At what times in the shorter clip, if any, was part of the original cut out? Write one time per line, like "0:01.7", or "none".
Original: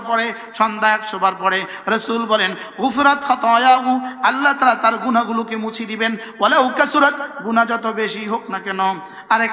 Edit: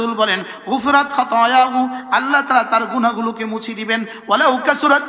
none